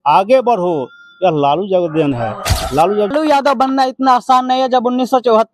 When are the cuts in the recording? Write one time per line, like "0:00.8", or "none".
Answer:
0:03.1